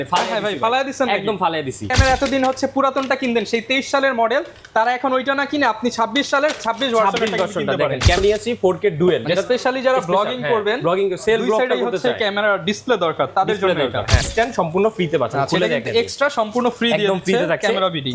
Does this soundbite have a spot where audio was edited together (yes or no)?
yes